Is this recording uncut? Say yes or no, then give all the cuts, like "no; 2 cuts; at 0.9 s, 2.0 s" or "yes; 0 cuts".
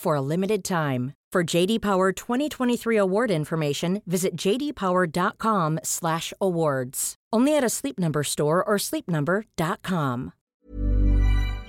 no; 1 cut; at 10.5 s